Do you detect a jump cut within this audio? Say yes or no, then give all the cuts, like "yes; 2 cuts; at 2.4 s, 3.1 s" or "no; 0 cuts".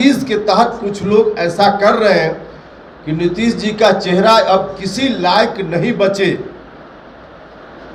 no; 0 cuts